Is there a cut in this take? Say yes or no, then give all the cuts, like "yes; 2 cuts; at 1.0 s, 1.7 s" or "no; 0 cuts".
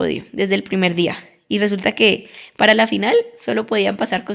no; 0 cuts